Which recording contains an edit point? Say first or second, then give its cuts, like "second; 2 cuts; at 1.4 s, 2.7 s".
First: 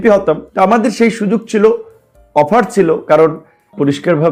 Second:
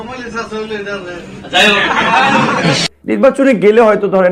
second; 1 cut; at 2.8 s